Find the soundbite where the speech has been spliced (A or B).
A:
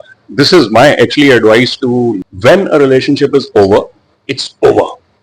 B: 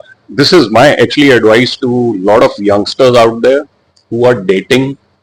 A